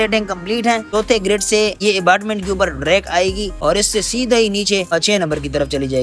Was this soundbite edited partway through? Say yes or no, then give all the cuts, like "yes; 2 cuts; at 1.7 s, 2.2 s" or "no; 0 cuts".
yes; 4 cuts; at 0.9 s, 1.8 s, 3.5 s, 4.9 s